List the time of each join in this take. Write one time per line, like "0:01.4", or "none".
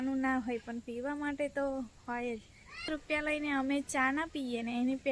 0:02.9